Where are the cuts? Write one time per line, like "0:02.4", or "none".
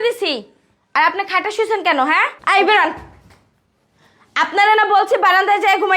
0:02.3